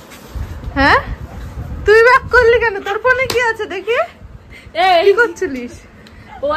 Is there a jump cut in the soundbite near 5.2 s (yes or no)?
no